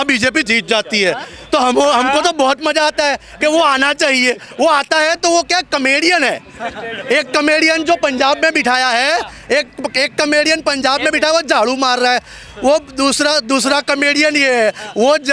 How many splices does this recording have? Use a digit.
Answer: 0